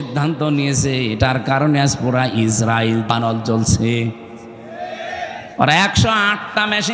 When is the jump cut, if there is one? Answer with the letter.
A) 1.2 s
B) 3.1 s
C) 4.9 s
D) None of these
B